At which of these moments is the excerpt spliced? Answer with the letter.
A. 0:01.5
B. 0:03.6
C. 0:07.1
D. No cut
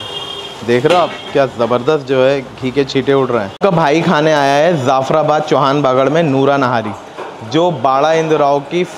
B